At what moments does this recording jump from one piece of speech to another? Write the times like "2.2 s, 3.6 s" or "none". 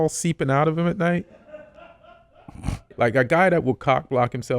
2.9 s